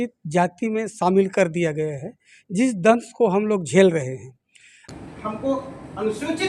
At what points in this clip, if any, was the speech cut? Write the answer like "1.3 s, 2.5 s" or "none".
4.8 s